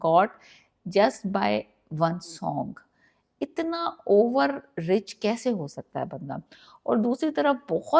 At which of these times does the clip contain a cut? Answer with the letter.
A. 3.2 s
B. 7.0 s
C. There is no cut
C